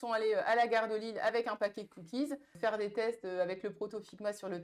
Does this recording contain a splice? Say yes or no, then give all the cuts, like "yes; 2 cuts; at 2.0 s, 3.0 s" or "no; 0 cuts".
yes; 1 cut; at 2.5 s